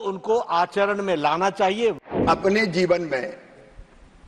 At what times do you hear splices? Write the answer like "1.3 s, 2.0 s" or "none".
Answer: 2.1 s